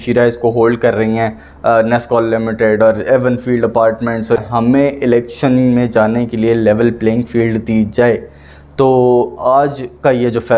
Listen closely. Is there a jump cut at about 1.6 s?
no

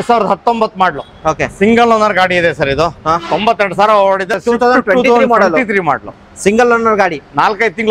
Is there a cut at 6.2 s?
no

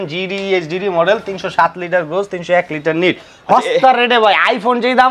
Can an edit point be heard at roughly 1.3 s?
no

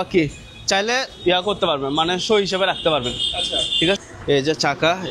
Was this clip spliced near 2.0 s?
no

